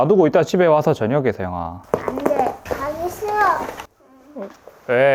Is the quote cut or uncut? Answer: cut